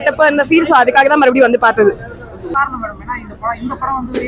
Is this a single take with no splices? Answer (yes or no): no